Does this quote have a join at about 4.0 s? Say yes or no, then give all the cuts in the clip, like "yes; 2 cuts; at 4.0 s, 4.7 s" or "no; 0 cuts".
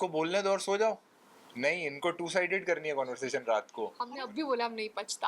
yes; 1 cut; at 4.0 s